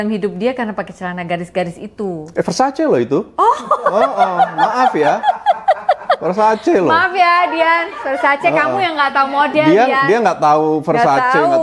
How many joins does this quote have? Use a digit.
0